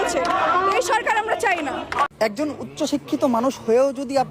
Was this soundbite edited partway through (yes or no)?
yes